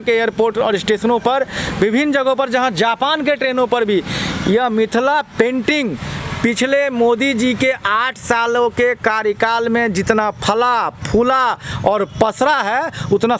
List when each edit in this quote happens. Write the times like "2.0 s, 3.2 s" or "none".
none